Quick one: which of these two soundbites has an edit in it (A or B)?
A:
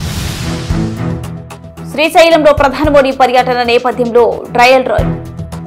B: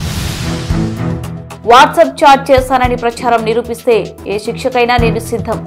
A